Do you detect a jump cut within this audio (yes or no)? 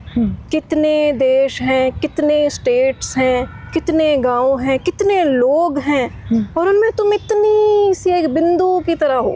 no